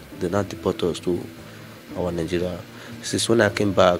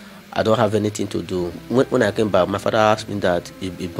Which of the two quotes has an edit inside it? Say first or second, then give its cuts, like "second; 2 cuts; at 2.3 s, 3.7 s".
second; 1 cut; at 1.6 s